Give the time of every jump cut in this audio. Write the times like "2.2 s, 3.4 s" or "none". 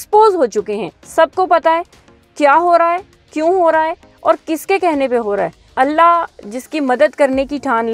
0.9 s